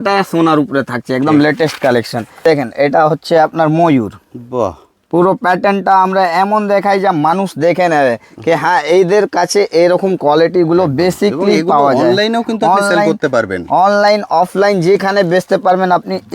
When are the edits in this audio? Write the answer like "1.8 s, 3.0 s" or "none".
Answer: 2.4 s